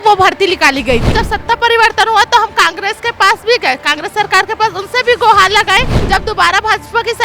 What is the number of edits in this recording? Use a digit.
2